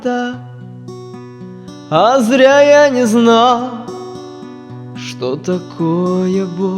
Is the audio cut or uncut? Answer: cut